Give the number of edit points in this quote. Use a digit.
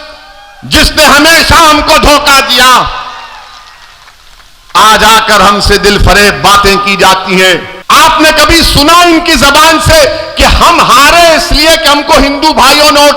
1